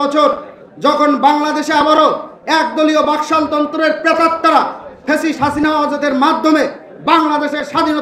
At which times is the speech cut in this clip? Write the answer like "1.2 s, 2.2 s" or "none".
none